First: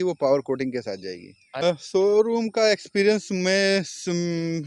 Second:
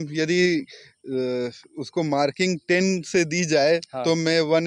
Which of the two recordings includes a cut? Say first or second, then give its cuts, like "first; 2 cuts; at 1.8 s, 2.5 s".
first; 1 cut; at 1.6 s